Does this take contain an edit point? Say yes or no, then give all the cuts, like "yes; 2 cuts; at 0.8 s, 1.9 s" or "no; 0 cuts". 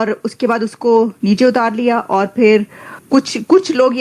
yes; 1 cut; at 3.0 s